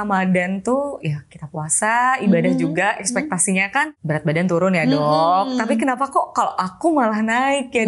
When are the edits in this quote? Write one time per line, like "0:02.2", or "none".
0:04.0

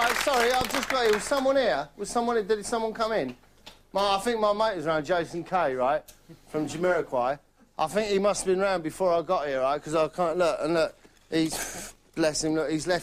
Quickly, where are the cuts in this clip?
none

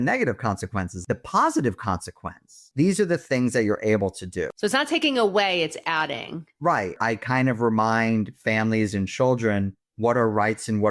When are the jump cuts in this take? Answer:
0:00.9
0:02.6
0:04.9
0:07.0

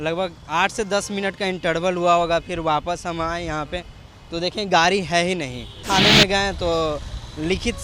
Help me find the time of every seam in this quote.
0:05.8

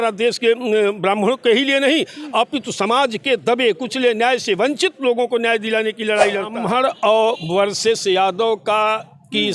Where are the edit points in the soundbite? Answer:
0:06.5

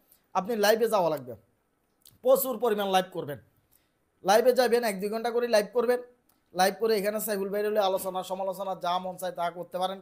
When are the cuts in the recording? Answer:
none

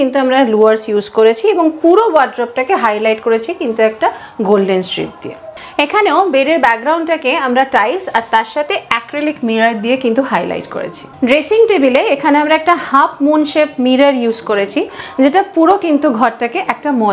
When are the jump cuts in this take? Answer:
none

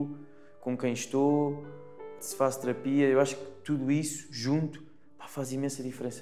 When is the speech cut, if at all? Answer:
0:02.1

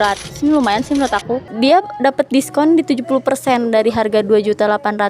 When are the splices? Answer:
0:01.5

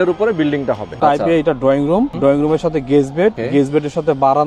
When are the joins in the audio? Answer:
0:00.9
0:02.1
0:03.4

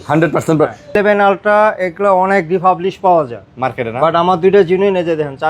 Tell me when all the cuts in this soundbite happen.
0:01.0

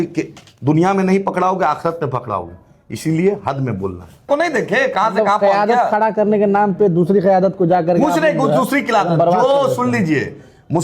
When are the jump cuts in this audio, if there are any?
0:04.2

